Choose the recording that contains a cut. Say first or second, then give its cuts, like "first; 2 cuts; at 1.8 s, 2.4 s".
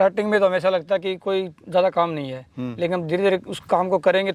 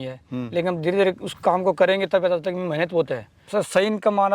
second; 1 cut; at 3.3 s